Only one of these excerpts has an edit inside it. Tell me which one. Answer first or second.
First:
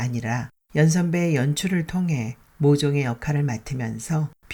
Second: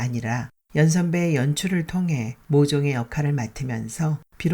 second